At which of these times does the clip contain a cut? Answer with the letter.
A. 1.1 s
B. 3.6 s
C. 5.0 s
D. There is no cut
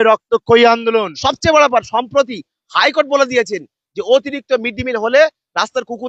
A